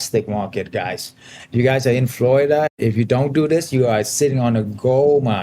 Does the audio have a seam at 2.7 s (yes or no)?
yes